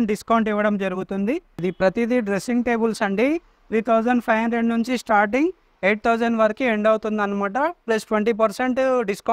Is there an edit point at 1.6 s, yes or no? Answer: yes